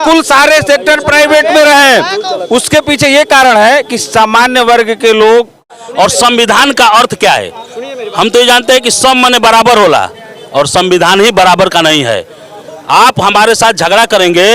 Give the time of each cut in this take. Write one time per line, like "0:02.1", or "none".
0:05.8